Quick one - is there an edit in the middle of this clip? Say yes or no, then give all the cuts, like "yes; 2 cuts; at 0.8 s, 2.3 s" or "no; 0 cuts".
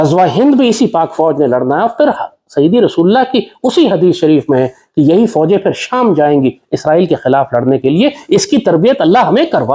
no; 0 cuts